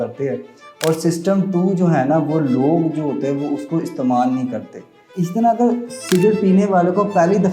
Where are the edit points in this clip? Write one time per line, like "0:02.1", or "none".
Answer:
0:05.0